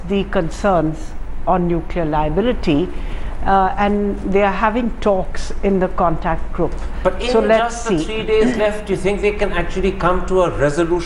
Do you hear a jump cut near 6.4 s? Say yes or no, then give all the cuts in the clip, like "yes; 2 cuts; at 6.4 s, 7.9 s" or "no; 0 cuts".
yes; 1 cut; at 6.4 s